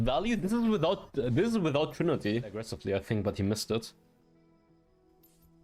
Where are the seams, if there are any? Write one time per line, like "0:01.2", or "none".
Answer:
0:02.7